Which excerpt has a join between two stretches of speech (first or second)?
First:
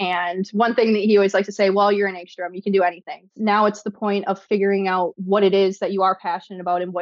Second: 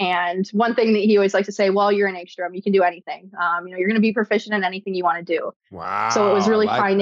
first